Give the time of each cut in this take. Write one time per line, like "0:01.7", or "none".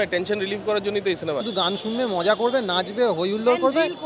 0:01.4